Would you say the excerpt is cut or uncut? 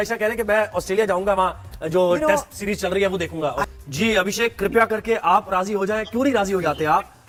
uncut